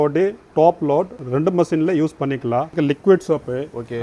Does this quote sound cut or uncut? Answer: cut